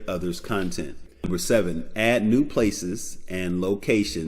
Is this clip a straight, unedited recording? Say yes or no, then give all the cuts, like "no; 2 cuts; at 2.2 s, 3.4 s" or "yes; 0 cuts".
no; 1 cut; at 1.1 s